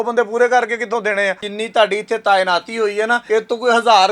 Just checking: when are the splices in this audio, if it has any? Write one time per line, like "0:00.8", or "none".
0:01.5
0:03.2